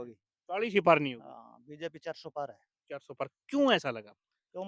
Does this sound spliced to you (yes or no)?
no